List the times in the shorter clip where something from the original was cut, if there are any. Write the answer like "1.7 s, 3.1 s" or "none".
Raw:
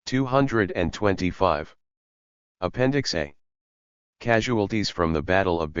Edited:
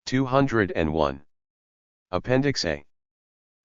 1.0 s